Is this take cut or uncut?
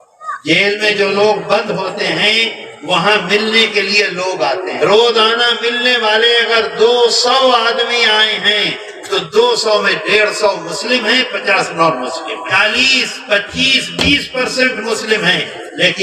cut